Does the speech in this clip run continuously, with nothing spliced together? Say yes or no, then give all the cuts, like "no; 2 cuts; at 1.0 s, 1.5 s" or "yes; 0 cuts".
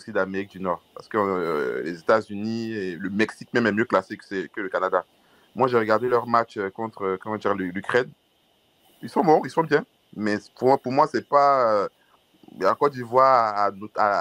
yes; 0 cuts